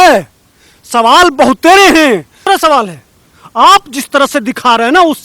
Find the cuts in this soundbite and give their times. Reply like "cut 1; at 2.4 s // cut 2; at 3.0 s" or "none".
cut 1; at 2.4 s